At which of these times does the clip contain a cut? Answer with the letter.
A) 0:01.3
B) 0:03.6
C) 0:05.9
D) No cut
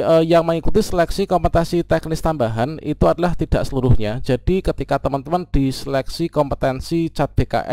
D